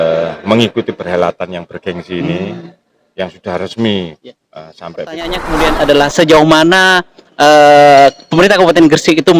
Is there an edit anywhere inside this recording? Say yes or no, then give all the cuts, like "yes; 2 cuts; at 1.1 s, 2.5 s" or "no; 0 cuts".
yes; 1 cut; at 5.4 s